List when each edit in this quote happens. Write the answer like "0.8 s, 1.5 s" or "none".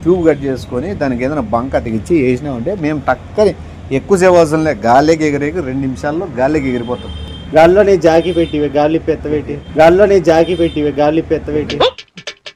none